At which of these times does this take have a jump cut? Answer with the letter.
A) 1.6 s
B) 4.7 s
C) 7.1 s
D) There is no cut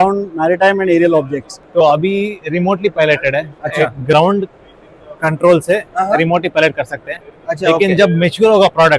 A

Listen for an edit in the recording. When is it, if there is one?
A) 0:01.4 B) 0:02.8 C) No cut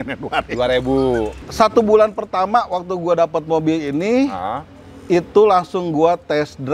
A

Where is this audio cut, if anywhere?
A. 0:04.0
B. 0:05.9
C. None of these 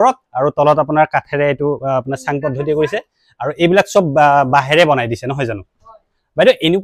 B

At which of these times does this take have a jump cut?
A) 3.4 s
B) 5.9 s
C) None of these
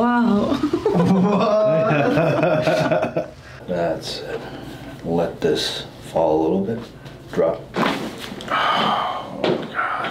A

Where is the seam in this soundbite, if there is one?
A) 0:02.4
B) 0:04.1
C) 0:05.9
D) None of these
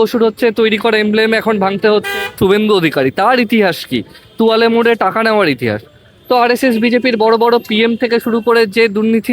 A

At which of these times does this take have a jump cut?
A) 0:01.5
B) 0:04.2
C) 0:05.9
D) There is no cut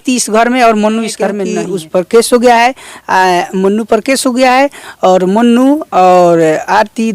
A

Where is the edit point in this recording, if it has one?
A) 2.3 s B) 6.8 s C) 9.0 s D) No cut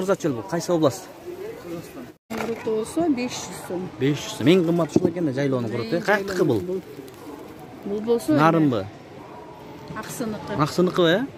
A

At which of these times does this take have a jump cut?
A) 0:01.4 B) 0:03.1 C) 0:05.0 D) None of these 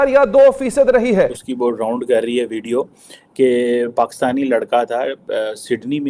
A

